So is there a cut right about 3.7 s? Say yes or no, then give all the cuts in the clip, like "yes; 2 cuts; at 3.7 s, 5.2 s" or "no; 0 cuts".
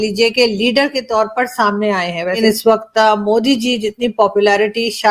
no; 1 cut; at 2.4 s